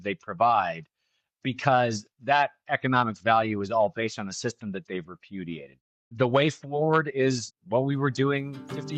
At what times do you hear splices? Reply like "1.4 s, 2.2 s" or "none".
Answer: 5.9 s, 7.5 s